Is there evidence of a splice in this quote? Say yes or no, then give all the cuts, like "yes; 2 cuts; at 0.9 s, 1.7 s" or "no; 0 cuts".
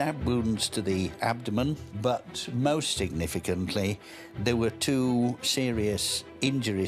no; 0 cuts